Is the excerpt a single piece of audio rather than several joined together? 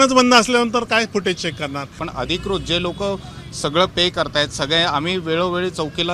no; 1 cut; at 2.0 s

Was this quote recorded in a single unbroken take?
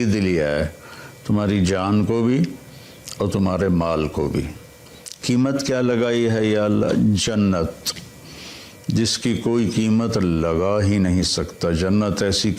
yes; 0 cuts

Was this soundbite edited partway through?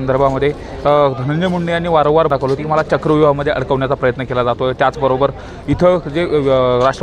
yes; 1 cut; at 2.3 s

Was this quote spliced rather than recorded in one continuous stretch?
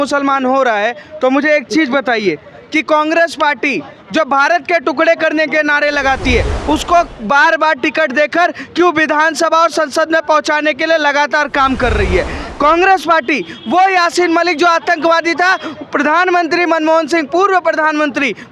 no; 0 cuts

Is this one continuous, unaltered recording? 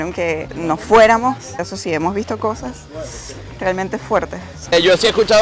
no; 2 cuts; at 1.6 s, 4.7 s

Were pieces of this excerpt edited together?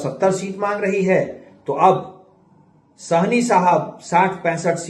no; 0 cuts

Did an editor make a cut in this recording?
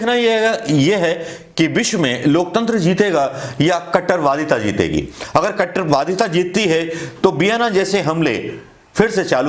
no; 0 cuts

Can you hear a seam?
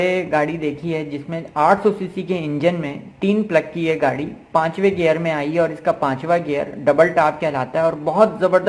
no; 0 cuts

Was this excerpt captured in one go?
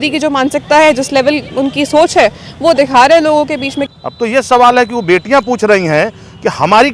no; 1 cut; at 3.8 s

